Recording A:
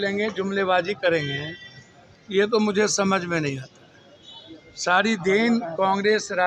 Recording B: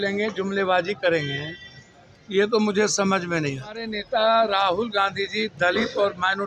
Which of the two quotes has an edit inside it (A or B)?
B